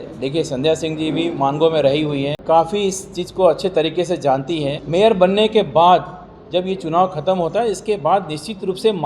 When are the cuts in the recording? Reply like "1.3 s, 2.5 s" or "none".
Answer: 2.3 s, 4.8 s